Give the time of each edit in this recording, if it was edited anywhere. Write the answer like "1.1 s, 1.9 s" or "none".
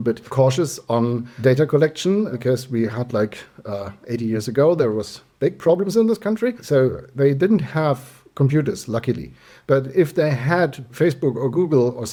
none